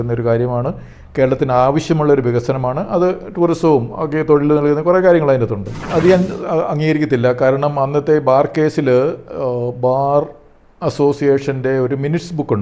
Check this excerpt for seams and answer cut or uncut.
cut